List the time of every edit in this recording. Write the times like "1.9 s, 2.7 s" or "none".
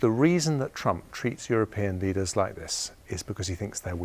none

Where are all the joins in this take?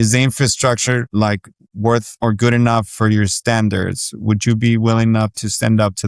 1.1 s, 2.1 s

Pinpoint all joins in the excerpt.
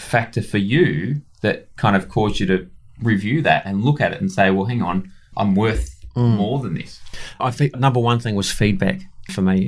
5.3 s, 7.4 s

